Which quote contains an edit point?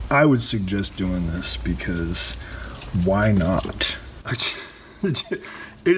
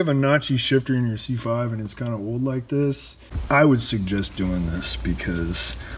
first; 1 cut; at 4.3 s

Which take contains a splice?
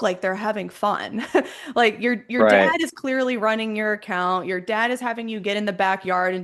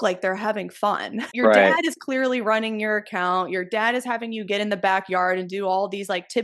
second; 1 cut; at 1.3 s

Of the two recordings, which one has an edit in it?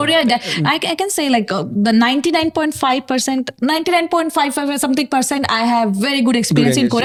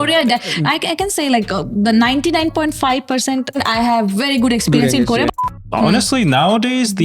second; 2 cuts; at 3.6 s, 5.4 s

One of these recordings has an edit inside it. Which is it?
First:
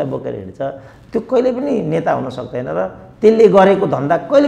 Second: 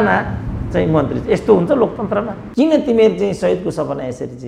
second; 1 cut; at 2.4 s

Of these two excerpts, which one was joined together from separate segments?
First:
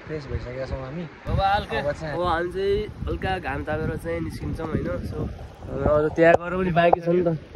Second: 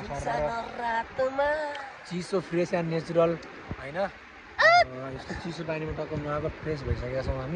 first; 1 cut; at 2.1 s

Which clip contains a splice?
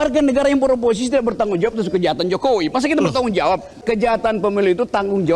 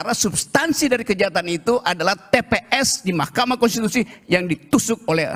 first; 1 cut; at 3.8 s

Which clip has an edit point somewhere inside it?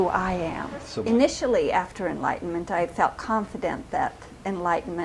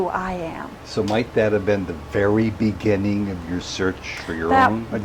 first; 1 cut; at 0.9 s

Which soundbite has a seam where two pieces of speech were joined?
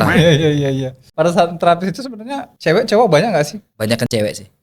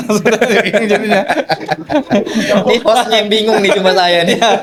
first; 3 cuts; at 1.0 s, 2.4 s, 3.6 s

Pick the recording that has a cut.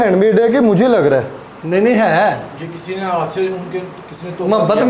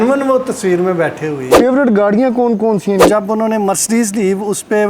second; 2 cuts; at 1.6 s, 3.0 s

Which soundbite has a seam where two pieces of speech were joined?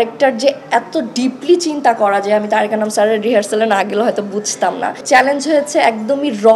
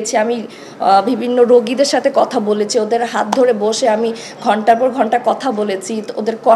first; 1 cut; at 5.0 s

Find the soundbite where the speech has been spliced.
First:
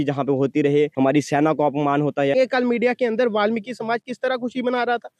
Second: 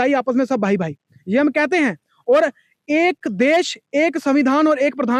first; 2 cuts; at 0.9 s, 2.3 s

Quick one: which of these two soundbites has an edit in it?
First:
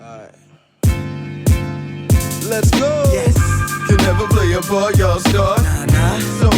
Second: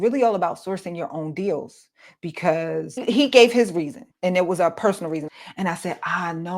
second; 3 cuts; at 3.0 s, 4.0 s, 5.3 s

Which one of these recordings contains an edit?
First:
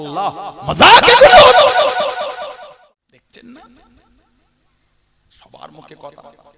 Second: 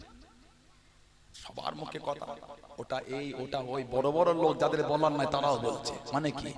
first; 1 cut; at 2.7 s

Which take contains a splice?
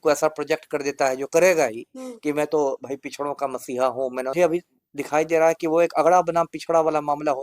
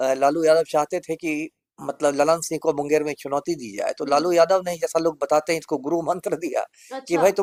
first; 1 cut; at 4.3 s

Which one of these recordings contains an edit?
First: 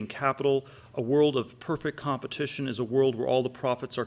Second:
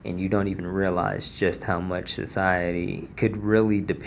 second; 1 cut; at 3.1 s

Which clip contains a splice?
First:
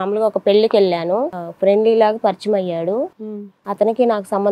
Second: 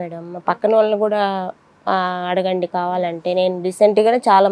first; 1 cut; at 1.4 s

